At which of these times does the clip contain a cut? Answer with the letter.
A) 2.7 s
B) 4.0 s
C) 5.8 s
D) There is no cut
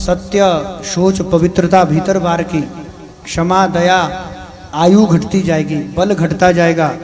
D